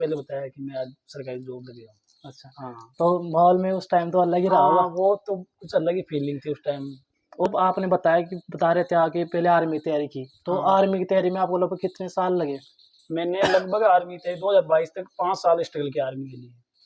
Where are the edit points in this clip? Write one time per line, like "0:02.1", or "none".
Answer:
none

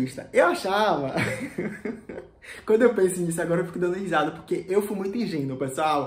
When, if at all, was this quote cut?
none

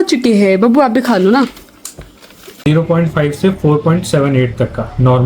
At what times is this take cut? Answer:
0:02.6

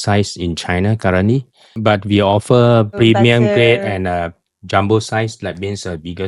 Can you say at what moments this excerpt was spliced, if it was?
0:01.6

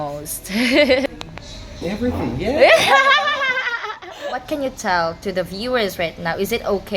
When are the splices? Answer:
0:01.1
0:04.4

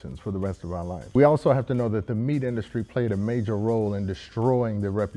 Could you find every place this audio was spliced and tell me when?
0:01.0

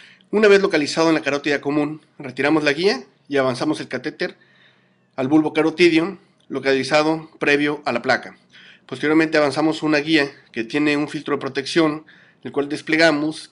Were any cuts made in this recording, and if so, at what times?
0:10.2

